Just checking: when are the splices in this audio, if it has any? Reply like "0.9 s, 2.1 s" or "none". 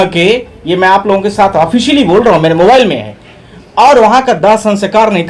none